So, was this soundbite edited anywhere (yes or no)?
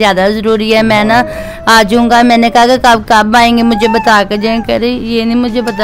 no